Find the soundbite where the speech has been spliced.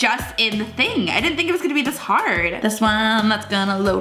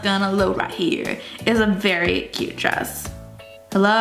first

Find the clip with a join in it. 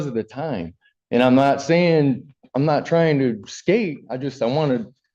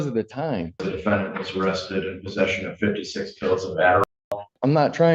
second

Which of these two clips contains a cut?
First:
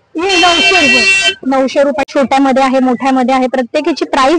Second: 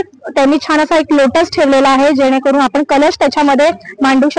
first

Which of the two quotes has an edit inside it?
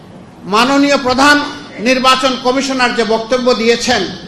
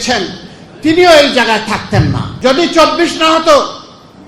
second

